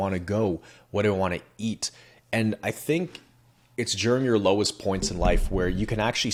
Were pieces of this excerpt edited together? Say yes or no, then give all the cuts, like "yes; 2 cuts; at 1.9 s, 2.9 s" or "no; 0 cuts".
no; 0 cuts